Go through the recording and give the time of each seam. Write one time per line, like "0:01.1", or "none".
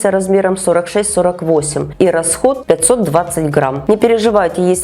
0:01.8
0:02.6
0:03.8